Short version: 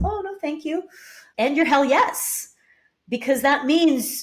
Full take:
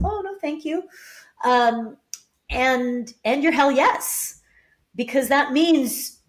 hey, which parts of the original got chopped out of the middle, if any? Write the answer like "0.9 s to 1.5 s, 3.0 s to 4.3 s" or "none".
1.2 s to 3.1 s